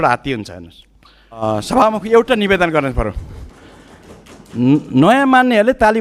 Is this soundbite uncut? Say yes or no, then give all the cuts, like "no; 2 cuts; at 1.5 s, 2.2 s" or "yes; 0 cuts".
no; 1 cut; at 1.3 s